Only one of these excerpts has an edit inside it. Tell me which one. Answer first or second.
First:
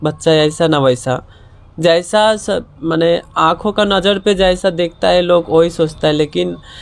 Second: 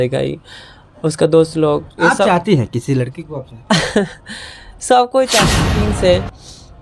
second